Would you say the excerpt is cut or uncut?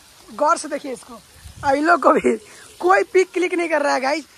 uncut